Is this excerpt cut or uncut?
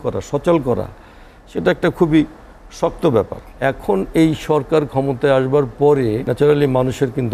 cut